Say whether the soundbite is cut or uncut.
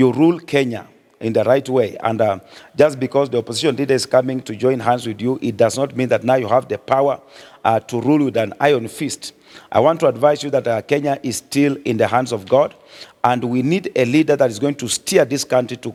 uncut